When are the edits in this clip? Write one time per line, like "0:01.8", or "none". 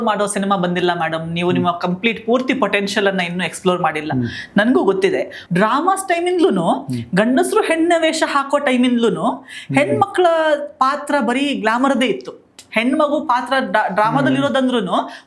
0:05.4